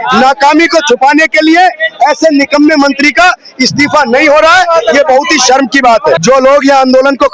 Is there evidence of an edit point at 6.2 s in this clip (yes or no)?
yes